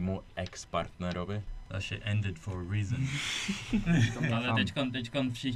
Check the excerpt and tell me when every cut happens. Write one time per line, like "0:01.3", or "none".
0:01.6
0:04.2